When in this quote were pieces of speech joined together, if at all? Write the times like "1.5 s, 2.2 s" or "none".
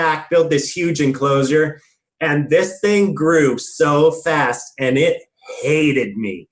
none